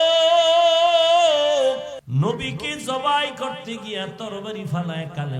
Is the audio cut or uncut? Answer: cut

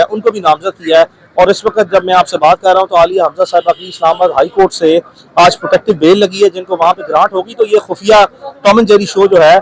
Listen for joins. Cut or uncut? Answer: uncut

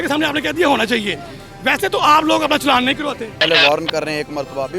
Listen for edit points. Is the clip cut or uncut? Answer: cut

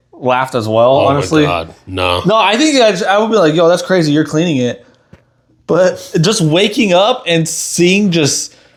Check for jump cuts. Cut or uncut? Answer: uncut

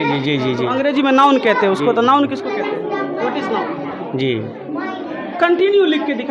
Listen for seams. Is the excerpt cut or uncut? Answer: cut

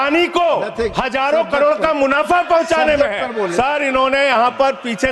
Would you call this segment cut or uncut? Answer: cut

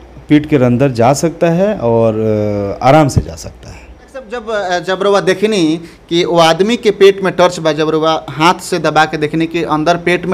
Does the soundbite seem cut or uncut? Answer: cut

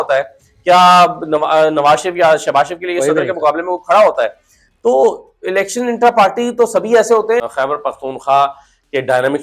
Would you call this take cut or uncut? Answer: cut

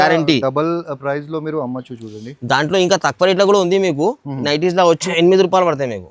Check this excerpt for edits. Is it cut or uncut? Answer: cut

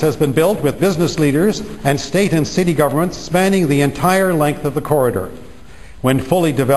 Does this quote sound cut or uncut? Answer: cut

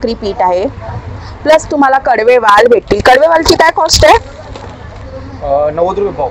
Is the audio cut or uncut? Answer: uncut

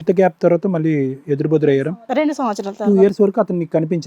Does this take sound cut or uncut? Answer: cut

